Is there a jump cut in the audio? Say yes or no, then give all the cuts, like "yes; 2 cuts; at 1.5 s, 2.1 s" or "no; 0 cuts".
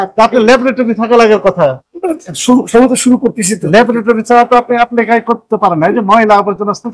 no; 0 cuts